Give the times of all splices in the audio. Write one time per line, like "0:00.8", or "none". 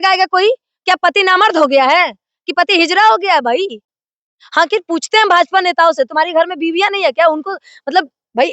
0:03.9